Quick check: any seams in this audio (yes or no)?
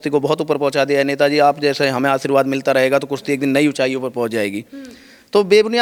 no